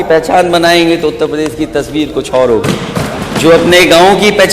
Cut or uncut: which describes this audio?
cut